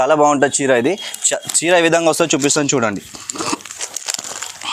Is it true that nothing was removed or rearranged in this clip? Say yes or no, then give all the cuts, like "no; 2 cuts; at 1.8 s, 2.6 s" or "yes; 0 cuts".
yes; 0 cuts